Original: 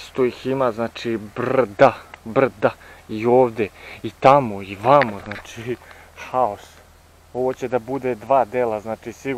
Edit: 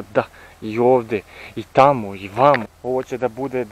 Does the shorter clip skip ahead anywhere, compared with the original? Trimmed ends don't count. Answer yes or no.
yes